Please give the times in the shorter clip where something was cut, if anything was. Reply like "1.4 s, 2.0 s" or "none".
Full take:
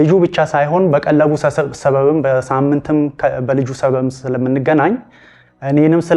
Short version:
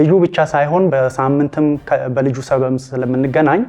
0.9 s